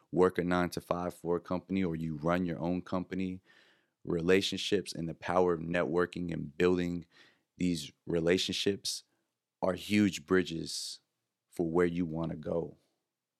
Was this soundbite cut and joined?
no; 0 cuts

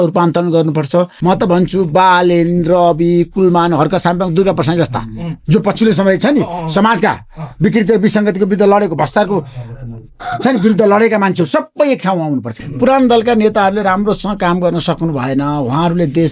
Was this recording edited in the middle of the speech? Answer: yes; 2 cuts; at 1.1 s, 12.6 s

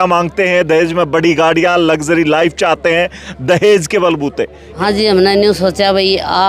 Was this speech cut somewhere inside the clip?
yes; 1 cut; at 4.6 s

